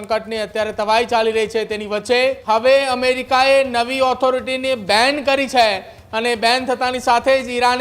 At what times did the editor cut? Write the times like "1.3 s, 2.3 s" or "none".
2.4 s